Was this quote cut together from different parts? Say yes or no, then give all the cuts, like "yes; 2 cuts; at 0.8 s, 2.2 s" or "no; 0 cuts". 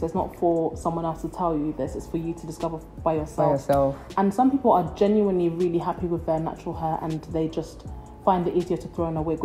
no; 0 cuts